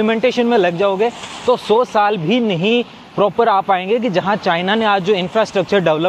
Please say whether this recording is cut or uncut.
uncut